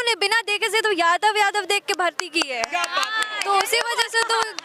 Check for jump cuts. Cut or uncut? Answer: uncut